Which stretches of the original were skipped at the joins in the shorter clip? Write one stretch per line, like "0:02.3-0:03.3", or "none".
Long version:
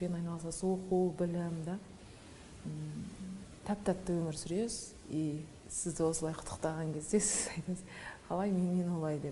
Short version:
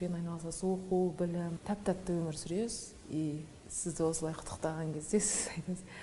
0:01.6-0:03.6